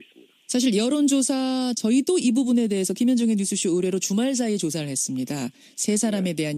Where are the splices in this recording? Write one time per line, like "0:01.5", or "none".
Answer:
0:04.2